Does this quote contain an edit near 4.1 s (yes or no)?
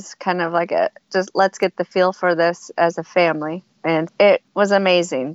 yes